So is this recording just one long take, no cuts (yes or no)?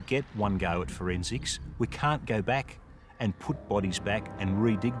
yes